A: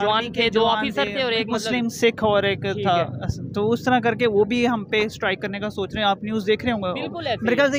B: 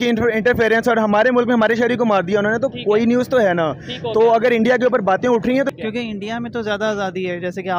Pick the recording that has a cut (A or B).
B